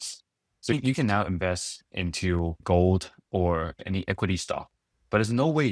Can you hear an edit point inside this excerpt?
yes; 3 cuts; at 0.7 s, 2.6 s, 3.8 s

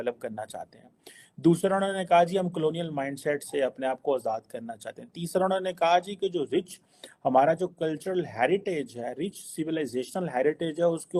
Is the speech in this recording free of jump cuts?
yes; 0 cuts

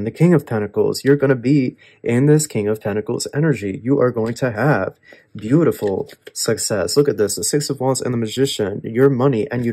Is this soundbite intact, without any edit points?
yes; 0 cuts

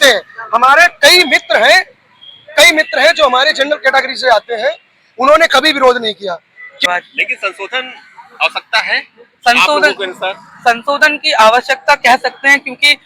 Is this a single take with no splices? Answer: no; 1 cut; at 6.8 s

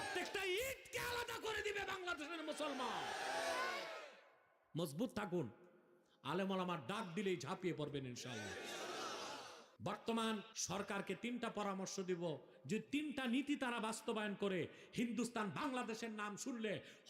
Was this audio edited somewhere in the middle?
yes; 2 cuts; at 9.6 s, 10.5 s

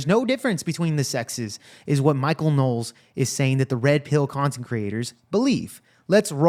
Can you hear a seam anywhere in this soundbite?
no; 0 cuts

